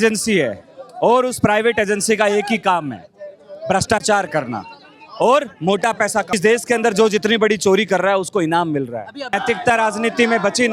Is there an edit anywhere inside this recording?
yes; 2 cuts; at 6.3 s, 9.3 s

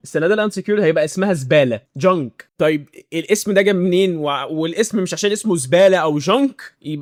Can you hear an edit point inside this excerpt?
no; 0 cuts

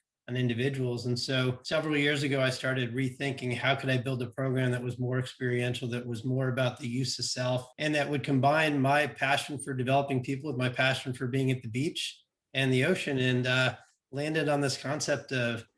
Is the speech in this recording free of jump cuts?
no; 2 cuts; at 1.6 s, 7.7 s

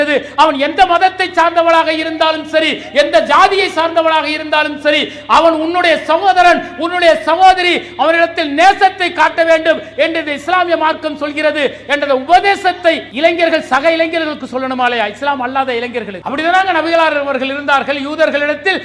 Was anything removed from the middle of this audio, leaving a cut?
yes; 2 cuts; at 13.1 s, 16.2 s

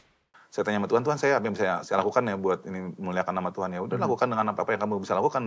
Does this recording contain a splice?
no; 0 cuts

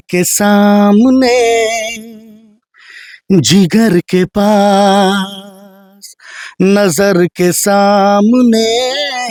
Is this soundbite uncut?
yes; 0 cuts

